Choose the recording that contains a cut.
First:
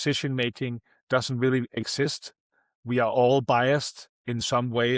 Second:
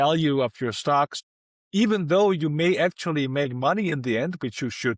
second; 1 cut; at 1.2 s

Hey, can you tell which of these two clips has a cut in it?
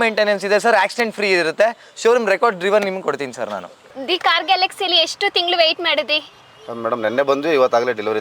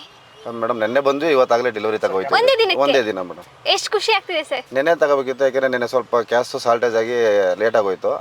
first; 1 cut; at 3.9 s

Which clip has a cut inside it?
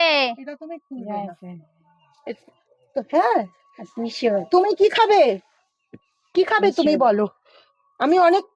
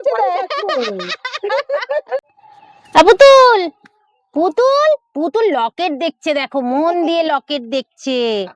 second; 1 cut; at 2.4 s

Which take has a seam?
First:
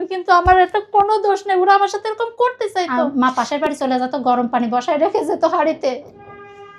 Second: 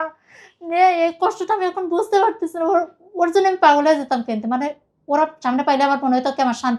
first; 1 cut; at 3.1 s

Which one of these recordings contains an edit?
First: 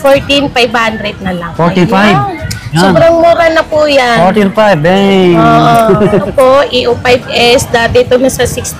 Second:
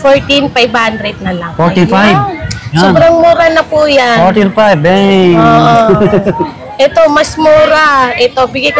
first; 1 cut; at 6.3 s

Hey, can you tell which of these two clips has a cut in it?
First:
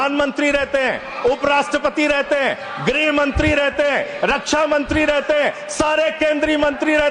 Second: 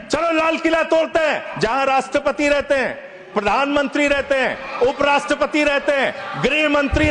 second; 1 cut; at 1.5 s

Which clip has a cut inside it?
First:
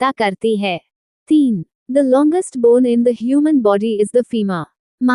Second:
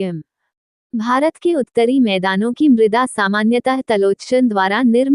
first; 1 cut; at 1.3 s

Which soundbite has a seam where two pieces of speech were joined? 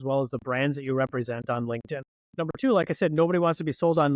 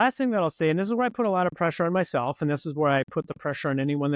first; 1 cut; at 2.2 s

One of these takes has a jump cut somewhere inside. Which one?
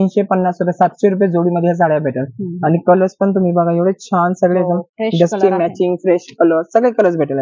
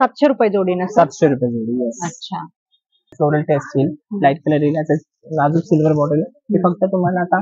second; 1 cut; at 3.1 s

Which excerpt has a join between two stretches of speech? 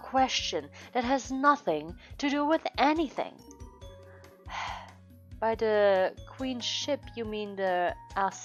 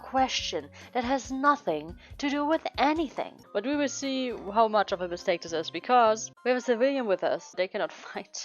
second; 3 cuts; at 3.4 s, 6.3 s, 7.5 s

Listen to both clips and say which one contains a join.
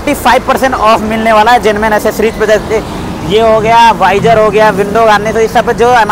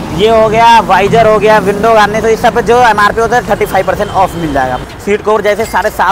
second; 1 cut; at 4.8 s

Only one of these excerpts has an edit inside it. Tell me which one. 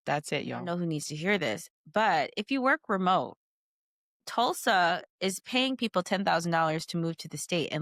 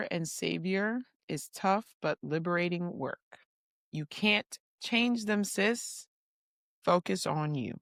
first; 1 cut; at 0.9 s

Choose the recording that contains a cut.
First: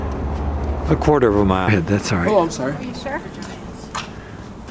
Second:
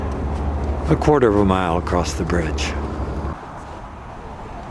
second; 1 cut; at 1.7 s

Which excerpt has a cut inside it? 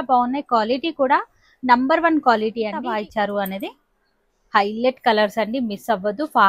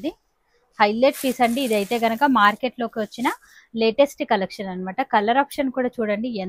first; 1 cut; at 2.8 s

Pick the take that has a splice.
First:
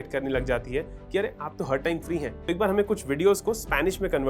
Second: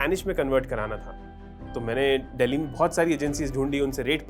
first; 1 cut; at 2.3 s

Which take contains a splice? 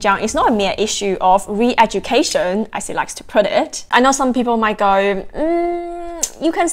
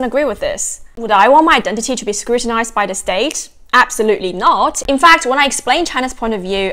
first; 1 cut; at 3.8 s

